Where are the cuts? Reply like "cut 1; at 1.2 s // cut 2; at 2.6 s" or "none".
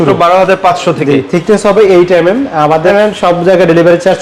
cut 1; at 2.9 s

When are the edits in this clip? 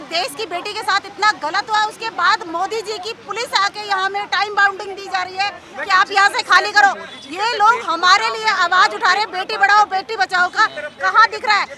none

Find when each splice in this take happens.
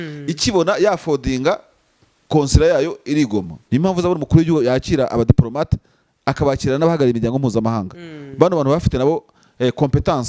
cut 1; at 3.5 s

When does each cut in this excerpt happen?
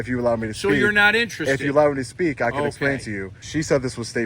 cut 1; at 3.3 s

